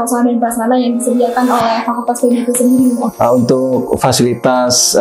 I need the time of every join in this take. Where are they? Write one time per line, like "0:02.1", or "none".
0:03.1

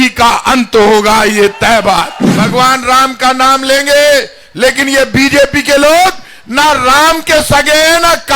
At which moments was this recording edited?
0:02.4

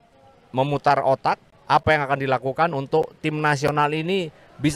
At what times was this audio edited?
0:01.5

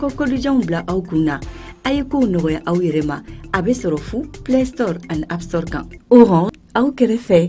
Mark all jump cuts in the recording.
0:06.5

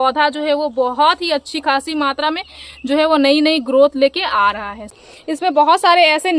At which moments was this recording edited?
0:05.0

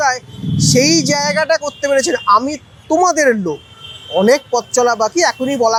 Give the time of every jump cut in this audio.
none

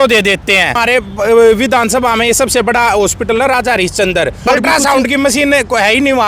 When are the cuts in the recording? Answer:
0:00.8
0:04.5

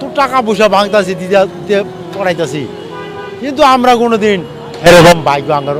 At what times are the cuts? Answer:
none

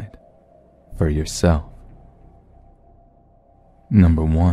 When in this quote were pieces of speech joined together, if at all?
0:01.4

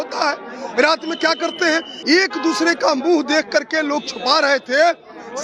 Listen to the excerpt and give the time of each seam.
0:01.9

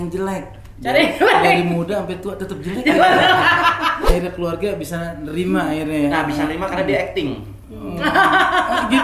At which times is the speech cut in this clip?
0:04.1

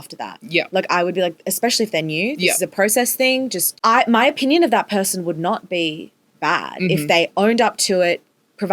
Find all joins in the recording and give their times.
0:03.6

